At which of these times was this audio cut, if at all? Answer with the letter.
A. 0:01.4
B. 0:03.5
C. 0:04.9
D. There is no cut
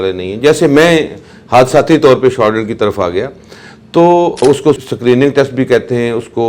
C